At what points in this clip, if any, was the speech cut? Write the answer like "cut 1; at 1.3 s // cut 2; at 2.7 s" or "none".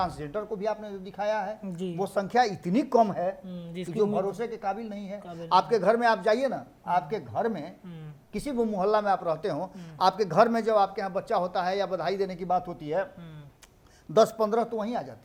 none